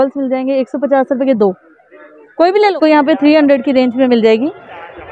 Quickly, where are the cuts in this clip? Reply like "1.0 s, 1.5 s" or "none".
2.7 s